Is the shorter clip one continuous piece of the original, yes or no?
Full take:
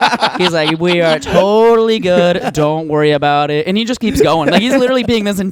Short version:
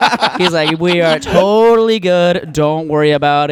yes